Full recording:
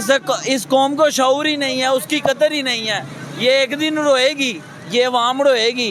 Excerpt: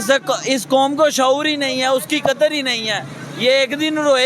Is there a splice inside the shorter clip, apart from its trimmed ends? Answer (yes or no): no